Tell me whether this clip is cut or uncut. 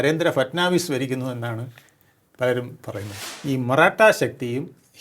cut